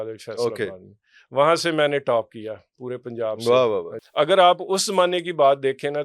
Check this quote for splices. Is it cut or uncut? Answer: cut